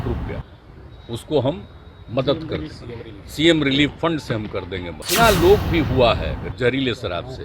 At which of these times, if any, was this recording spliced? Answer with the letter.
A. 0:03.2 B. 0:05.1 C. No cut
B